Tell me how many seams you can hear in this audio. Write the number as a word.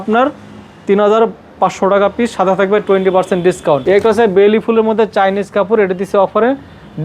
one